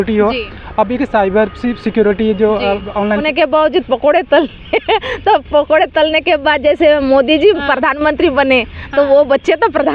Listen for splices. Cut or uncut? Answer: cut